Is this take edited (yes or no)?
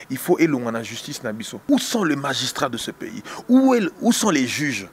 yes